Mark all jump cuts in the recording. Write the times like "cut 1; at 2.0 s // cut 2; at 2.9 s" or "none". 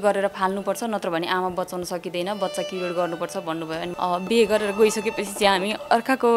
cut 1; at 3.9 s